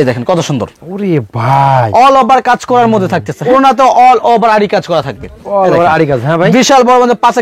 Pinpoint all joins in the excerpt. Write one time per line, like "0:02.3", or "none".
0:03.4